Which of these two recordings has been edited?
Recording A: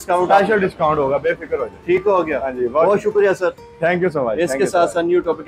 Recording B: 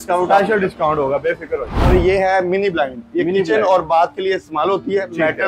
B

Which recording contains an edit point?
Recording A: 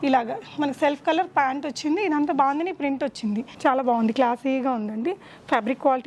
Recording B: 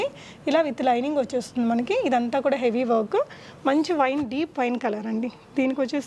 A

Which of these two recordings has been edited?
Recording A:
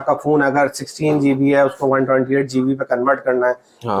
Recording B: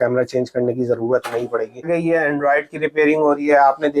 B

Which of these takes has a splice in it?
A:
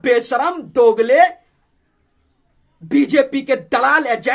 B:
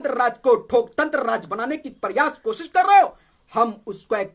B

